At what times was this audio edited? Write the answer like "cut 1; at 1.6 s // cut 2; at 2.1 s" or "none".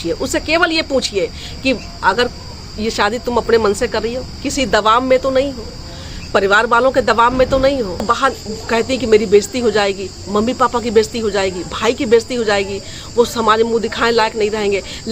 cut 1; at 8.0 s